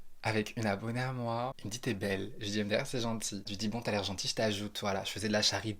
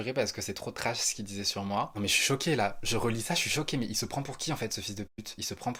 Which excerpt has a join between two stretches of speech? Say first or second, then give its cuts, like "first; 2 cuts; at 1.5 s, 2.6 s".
first; 1 cut; at 1.5 s